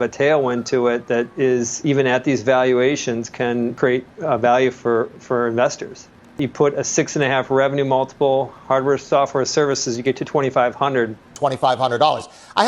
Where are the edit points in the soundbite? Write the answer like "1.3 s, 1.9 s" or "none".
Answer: 1.8 s, 3.7 s, 6.4 s, 11.3 s